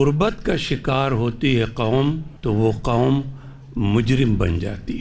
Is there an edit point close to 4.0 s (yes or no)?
no